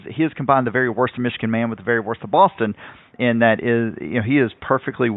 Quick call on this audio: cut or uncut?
cut